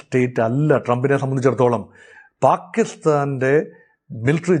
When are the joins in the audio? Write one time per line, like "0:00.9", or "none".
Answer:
none